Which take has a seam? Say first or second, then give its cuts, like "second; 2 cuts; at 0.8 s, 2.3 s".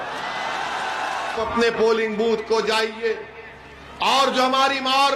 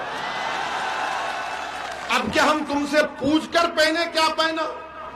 first; 1 cut; at 1.4 s